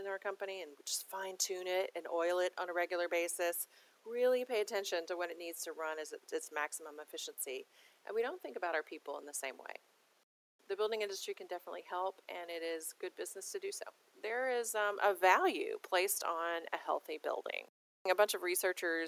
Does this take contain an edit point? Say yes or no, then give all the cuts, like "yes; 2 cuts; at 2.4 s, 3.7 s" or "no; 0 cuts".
yes; 3 cuts; at 10.5 s, 14.1 s, 17.8 s